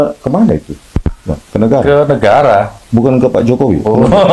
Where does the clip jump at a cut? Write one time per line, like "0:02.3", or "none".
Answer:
none